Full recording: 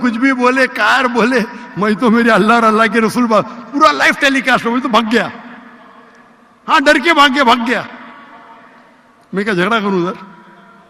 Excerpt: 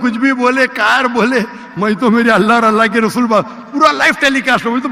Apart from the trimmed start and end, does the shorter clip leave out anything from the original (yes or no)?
no